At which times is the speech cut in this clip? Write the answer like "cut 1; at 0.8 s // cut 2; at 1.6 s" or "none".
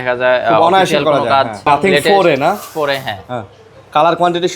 cut 1; at 1.6 s